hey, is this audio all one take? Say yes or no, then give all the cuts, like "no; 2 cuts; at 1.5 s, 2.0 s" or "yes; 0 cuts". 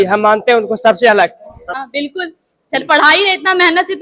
no; 1 cut; at 1.8 s